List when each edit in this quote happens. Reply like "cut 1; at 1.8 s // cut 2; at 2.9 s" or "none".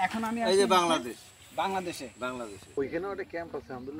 cut 1; at 2.8 s